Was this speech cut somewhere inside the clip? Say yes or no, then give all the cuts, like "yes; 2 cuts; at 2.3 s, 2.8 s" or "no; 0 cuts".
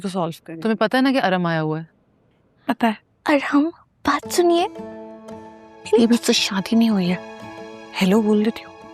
yes; 1 cut; at 3.1 s